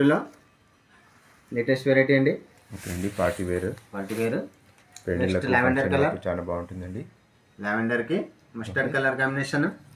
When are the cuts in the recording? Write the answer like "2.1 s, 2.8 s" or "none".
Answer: none